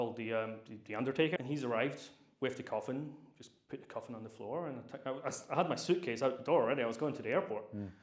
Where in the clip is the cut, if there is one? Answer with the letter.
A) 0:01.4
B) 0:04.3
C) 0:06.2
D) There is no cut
A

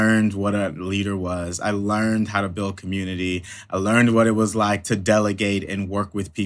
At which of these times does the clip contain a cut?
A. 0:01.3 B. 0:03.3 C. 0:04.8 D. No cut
C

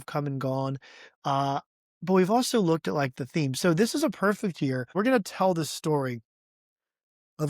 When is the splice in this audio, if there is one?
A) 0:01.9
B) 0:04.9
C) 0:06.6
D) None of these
B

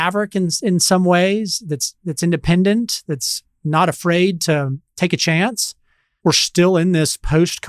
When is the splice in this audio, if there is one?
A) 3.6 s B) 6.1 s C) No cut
B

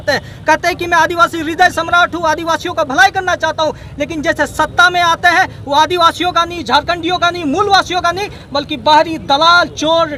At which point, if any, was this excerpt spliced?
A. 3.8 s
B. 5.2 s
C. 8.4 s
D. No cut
D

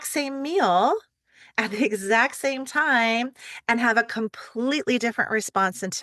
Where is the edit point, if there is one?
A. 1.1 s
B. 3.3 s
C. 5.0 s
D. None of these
D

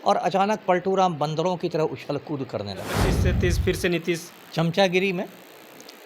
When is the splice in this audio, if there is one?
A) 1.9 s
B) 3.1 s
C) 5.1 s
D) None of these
B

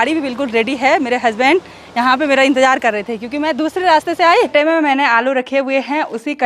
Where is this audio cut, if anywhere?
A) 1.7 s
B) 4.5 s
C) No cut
B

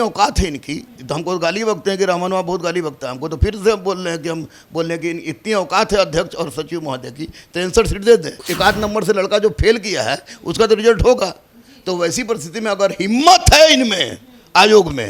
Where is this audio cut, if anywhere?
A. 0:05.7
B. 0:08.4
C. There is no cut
B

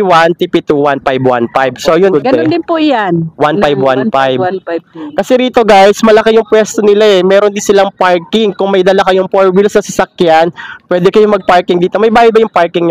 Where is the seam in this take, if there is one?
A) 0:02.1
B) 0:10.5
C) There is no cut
A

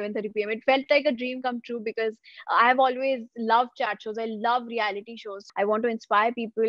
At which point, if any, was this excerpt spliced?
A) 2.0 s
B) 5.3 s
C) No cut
B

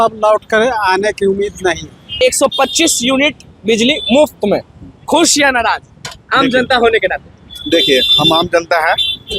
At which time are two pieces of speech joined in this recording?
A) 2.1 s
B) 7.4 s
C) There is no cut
A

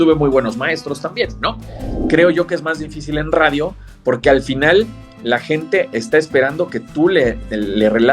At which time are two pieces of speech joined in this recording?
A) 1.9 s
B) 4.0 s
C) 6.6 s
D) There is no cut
A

